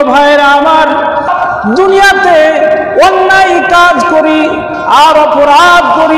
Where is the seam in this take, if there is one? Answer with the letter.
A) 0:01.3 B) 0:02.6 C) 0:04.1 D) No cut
A